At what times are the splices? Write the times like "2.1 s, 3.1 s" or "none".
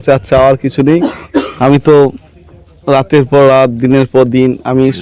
1.2 s

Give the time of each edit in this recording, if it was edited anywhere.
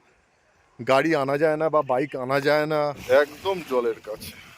3.0 s

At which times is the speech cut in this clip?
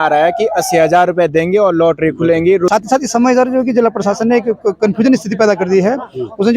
2.7 s

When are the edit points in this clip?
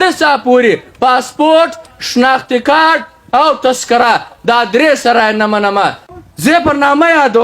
6.0 s

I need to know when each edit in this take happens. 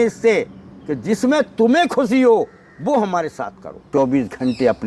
3.9 s

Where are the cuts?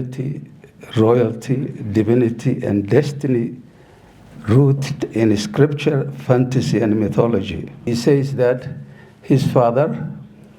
7.9 s

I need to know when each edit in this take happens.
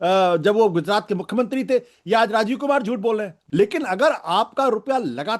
3.4 s

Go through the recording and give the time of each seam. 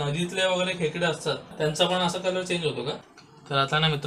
1.5 s, 3.0 s

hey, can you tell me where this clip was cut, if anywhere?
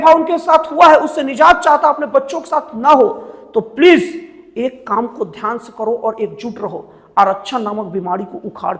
none

